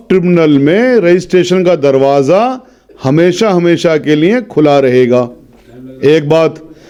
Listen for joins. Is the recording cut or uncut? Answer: uncut